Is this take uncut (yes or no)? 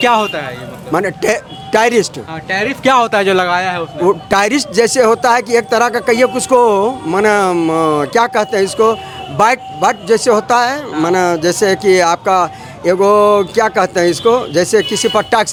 yes